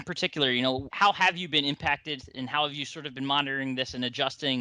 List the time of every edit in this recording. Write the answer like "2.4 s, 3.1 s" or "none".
0.9 s